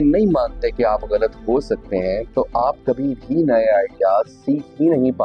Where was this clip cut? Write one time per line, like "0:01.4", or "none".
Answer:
none